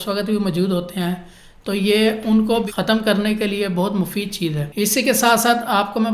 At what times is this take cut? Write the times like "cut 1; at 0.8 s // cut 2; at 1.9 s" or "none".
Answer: cut 1; at 2.7 s // cut 2; at 4.6 s